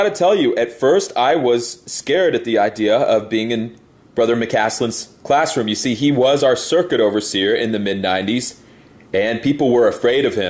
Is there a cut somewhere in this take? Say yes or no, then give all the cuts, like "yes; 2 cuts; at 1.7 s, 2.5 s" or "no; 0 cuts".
no; 0 cuts